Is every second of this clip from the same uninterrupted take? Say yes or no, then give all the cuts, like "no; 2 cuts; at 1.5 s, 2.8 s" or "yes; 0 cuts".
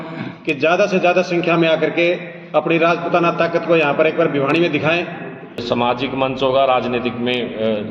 no; 1 cut; at 5.6 s